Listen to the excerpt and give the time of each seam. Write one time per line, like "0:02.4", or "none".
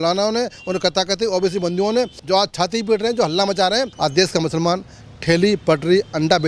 0:02.2
0:03.9